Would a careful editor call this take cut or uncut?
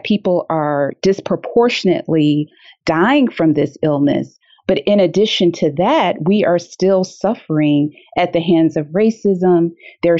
cut